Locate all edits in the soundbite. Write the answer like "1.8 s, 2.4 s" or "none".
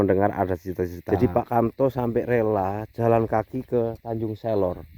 1.0 s